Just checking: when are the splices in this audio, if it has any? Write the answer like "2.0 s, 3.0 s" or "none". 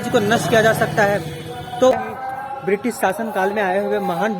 1.9 s